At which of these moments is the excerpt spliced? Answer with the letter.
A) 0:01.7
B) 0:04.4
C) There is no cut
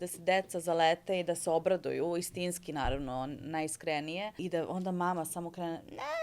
B